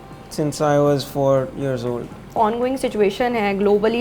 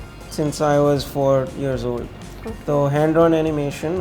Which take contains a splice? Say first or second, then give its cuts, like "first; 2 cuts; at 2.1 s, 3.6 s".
first; 1 cut; at 2.4 s